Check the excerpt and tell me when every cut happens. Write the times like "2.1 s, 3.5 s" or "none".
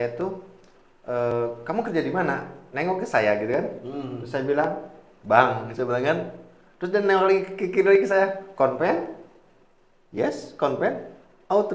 none